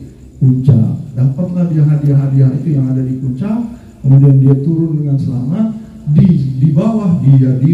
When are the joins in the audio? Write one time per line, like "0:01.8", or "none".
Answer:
none